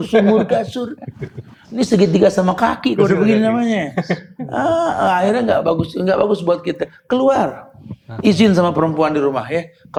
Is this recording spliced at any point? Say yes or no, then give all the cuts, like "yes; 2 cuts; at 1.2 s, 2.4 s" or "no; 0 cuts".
no; 0 cuts